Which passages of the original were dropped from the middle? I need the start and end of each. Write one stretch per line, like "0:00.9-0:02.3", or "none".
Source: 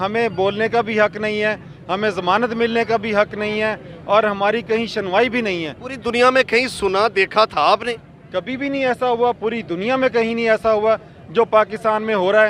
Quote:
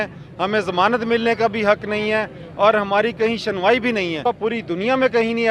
0:05.8-0:09.3